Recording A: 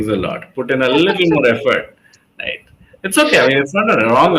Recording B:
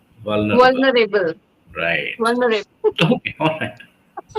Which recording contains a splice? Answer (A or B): B